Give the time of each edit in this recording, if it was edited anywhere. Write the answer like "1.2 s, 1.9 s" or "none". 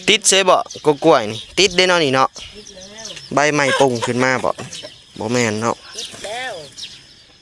none

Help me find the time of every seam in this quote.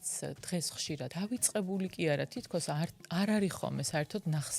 1.1 s

